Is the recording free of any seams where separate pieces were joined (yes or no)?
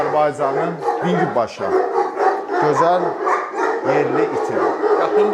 yes